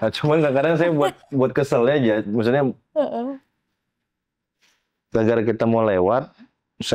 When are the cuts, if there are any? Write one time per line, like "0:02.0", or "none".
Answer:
none